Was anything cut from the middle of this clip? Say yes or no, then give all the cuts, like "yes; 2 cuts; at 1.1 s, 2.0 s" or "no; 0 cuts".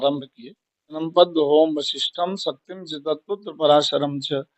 yes; 1 cut; at 1.0 s